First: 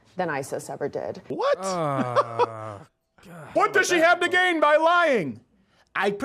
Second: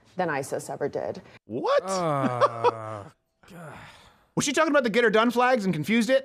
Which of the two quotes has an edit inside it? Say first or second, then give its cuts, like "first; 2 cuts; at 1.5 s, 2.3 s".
first; 2 cuts; at 1.2 s, 3.5 s